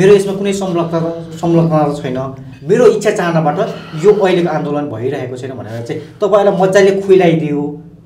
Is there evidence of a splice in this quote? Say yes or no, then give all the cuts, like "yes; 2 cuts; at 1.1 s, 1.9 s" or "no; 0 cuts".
no; 0 cuts